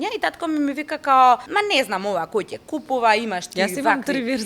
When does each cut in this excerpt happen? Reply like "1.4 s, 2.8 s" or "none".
1.5 s